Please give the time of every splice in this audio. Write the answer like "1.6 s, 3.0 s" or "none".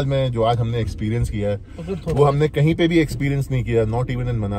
none

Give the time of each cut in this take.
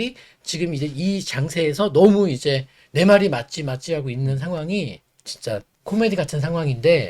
5.4 s

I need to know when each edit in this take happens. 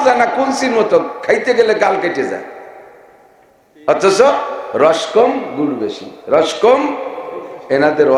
none

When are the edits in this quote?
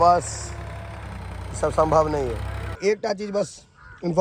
2.8 s

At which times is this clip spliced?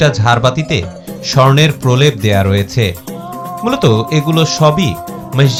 none

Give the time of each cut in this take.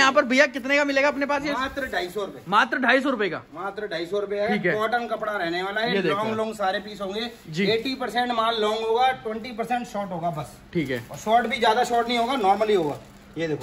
none

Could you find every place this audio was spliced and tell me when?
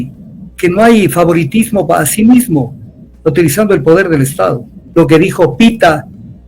4.7 s

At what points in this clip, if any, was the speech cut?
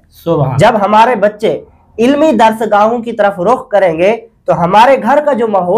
none

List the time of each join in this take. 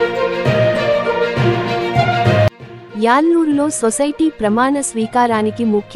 2.2 s

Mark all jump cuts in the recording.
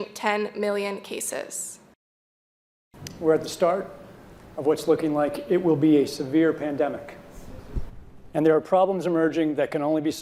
2.3 s

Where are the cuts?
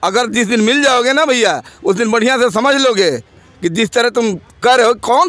none

